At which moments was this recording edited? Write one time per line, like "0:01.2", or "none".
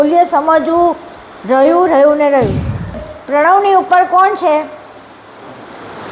0:03.0